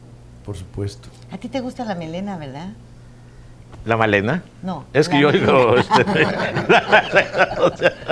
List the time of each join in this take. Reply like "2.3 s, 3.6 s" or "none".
3.9 s